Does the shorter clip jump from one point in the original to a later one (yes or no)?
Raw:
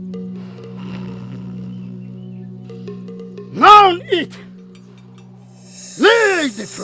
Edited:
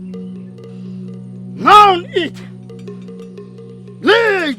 yes